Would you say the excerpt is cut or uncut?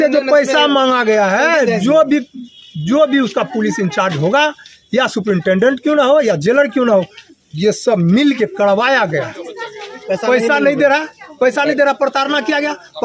uncut